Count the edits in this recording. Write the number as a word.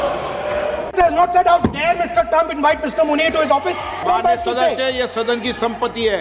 two